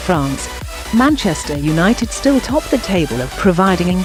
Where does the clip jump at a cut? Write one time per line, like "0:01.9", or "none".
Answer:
none